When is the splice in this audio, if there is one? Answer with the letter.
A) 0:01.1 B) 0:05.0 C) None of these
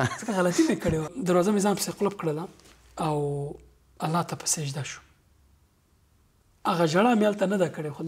A